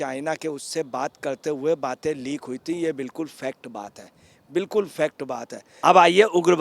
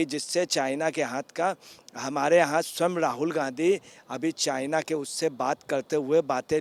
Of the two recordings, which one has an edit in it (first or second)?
first